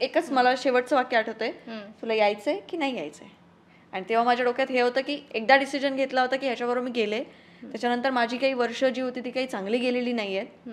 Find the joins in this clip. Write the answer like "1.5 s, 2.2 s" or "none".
5.2 s